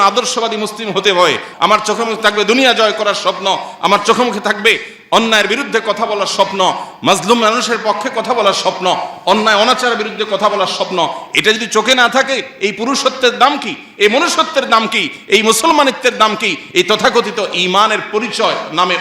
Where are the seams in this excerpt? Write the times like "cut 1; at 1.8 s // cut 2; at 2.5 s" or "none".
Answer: cut 1; at 1.5 s